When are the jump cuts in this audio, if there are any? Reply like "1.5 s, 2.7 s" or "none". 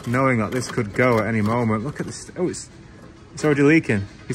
none